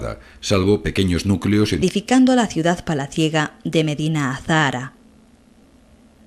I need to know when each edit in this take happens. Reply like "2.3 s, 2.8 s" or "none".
none